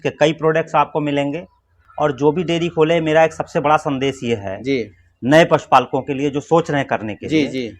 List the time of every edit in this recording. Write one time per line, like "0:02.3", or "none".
0:01.7